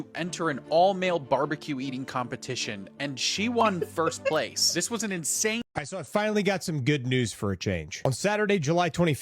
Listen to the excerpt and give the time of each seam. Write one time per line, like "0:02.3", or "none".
0:05.6

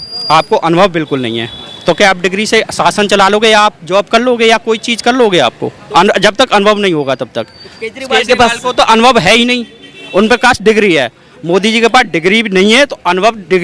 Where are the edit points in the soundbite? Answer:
none

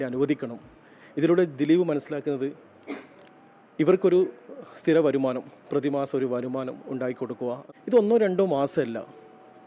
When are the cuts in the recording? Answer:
0:07.6

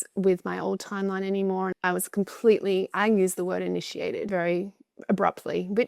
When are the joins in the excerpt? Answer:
0:01.7
0:04.3

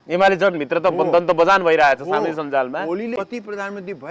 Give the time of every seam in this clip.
0:03.2

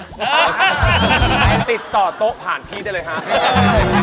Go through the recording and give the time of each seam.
0:01.6
0:03.2

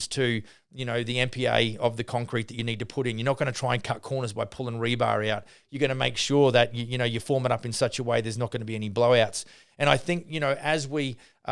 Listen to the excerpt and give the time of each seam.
none

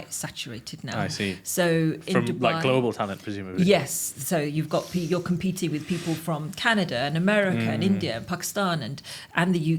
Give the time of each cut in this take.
none

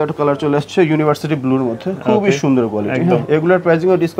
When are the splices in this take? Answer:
none

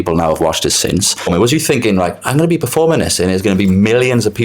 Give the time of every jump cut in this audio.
0:01.3

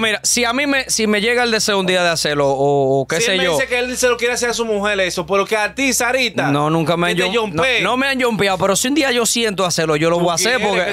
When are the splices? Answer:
none

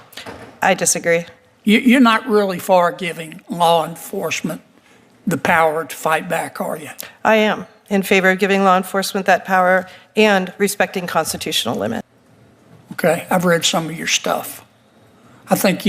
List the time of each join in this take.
0:12.0

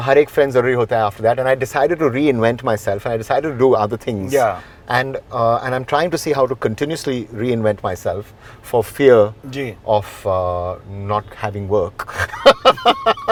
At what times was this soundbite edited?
none

